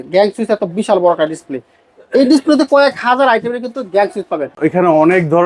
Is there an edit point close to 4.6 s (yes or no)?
yes